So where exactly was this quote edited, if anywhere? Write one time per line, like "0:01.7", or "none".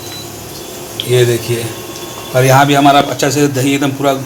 none